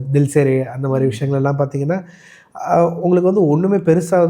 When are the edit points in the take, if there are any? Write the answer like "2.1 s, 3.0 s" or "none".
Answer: none